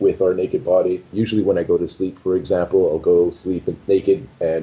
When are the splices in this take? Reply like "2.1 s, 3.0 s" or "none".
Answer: 1.1 s